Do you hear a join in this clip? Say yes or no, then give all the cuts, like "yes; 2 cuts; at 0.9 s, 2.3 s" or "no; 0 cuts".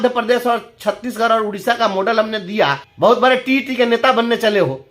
yes; 1 cut; at 2.9 s